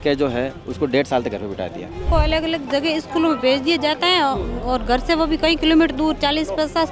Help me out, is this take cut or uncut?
cut